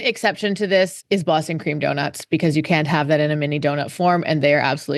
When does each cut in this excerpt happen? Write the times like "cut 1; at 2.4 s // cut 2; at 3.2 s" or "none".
cut 1; at 1.0 s